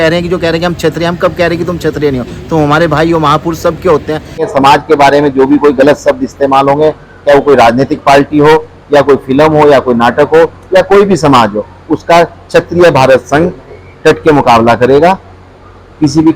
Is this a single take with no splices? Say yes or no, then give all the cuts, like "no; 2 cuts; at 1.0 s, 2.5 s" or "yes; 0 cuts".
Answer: no; 1 cut; at 4.5 s